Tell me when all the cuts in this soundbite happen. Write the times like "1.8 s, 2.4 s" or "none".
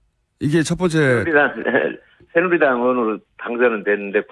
1.5 s